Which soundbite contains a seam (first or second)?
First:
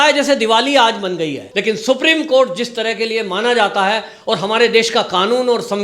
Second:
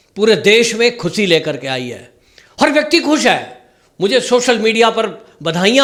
first